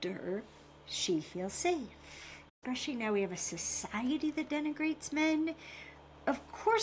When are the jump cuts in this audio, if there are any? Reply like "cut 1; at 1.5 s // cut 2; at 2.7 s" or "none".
cut 1; at 2.6 s